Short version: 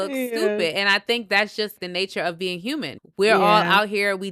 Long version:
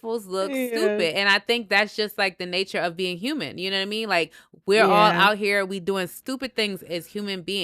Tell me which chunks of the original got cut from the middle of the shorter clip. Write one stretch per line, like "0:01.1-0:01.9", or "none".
0:02.1-0:02.3
0:03.6-0:04.5